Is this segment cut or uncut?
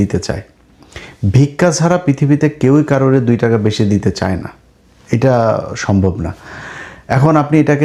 uncut